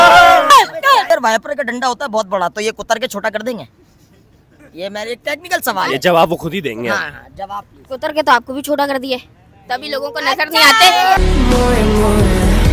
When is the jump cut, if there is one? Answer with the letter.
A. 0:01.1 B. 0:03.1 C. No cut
A